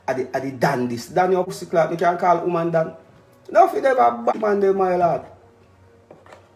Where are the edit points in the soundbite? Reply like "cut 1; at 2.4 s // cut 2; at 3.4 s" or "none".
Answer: cut 1; at 1.5 s // cut 2; at 4.3 s